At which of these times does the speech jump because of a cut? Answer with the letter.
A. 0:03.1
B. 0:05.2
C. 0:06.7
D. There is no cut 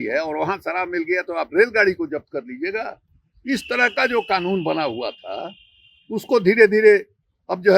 D